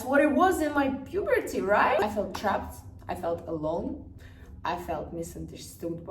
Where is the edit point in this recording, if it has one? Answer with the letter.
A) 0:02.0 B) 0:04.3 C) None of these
A